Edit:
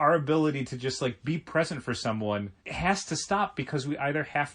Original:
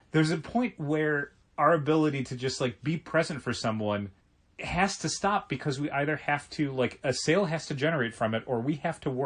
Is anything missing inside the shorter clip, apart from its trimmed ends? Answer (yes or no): yes